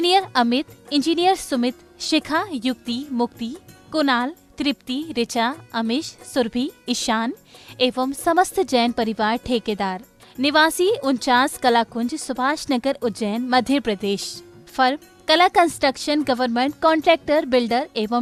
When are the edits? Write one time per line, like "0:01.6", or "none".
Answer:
none

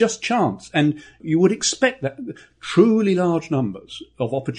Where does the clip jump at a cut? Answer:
0:01.2

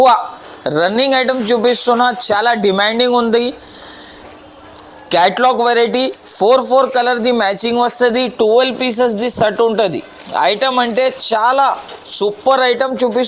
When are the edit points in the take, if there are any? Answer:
none

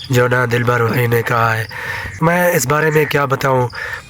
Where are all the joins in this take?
none

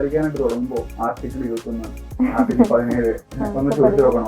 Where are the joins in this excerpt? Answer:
0:00.9

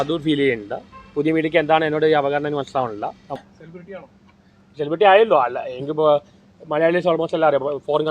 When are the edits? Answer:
0:03.4

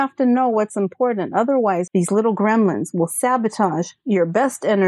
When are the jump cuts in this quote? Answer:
0:01.9

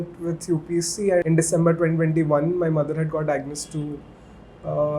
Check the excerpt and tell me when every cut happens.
0:01.2

